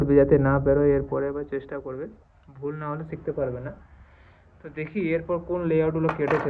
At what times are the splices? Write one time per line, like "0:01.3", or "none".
none